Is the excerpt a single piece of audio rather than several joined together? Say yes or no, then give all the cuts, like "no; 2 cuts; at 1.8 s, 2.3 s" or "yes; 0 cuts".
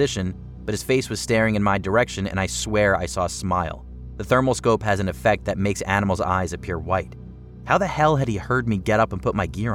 yes; 0 cuts